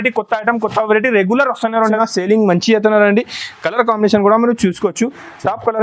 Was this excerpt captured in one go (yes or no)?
no